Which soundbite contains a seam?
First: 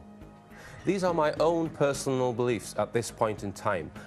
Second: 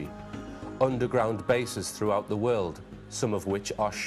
first; 1 cut; at 1.9 s

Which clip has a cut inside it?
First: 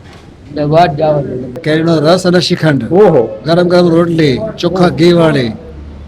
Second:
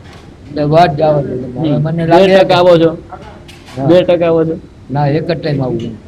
first; 1 cut; at 1.6 s

